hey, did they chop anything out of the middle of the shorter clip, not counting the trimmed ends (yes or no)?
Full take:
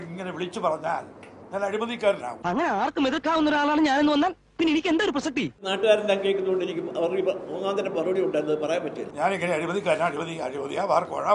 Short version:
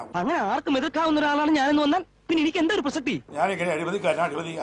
yes